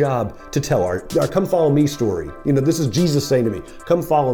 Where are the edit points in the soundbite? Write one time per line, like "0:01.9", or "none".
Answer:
0:01.0